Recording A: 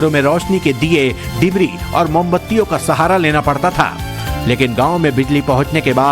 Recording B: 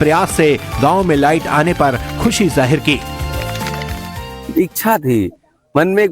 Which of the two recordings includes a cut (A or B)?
A